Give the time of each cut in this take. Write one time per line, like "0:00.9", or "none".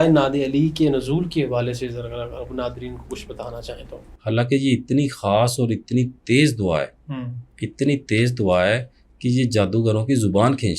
0:03.9